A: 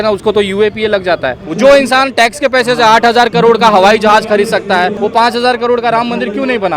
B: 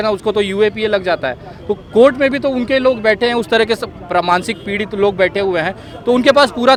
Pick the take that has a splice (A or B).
A